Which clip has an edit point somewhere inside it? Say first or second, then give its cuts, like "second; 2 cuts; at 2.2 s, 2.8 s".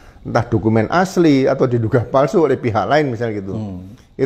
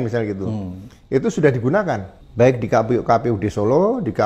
second; 1 cut; at 2.2 s